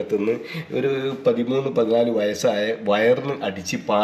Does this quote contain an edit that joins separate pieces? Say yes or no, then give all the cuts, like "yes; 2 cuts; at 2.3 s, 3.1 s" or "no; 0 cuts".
no; 0 cuts